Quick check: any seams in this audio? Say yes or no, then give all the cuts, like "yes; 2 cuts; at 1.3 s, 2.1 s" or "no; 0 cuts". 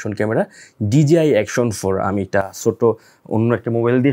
no; 0 cuts